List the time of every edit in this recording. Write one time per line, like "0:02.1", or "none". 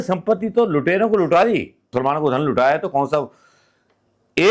0:01.9

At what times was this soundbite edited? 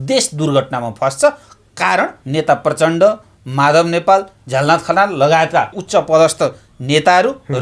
0:02.2
0:05.8

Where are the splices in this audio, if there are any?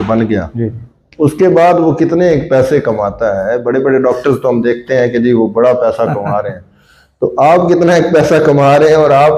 none

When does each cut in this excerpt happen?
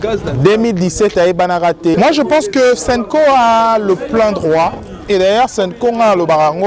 0:01.9

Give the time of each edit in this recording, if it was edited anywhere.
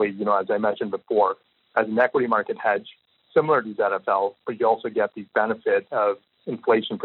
0:03.3

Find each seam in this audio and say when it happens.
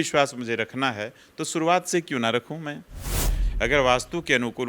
0:03.4

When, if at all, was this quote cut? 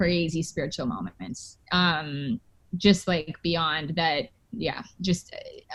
none

